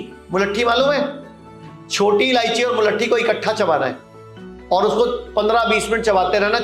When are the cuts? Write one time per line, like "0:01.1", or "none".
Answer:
none